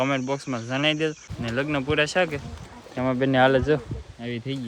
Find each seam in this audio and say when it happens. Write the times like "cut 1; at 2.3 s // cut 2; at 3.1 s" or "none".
cut 1; at 1.3 s